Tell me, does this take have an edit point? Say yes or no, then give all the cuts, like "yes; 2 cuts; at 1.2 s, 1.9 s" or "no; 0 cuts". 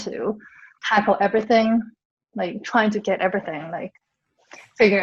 no; 0 cuts